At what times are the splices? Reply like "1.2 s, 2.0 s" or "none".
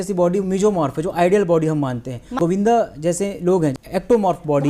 2.4 s, 3.8 s